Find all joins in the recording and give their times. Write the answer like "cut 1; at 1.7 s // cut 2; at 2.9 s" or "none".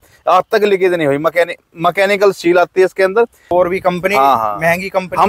cut 1; at 3.5 s